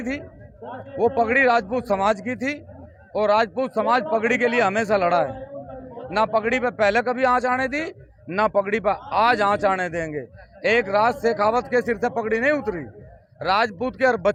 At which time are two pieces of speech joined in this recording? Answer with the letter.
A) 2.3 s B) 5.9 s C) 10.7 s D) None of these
D